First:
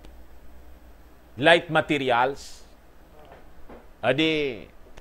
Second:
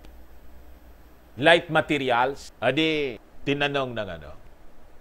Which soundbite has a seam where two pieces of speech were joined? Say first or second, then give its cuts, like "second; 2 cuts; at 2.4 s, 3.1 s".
second; 2 cuts; at 2.5 s, 3.3 s